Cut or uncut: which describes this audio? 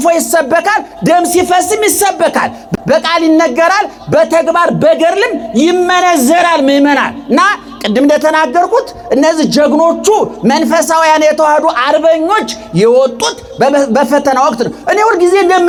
uncut